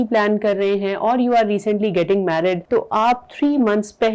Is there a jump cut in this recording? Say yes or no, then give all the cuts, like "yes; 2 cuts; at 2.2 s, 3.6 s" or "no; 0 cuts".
yes; 1 cut; at 2.6 s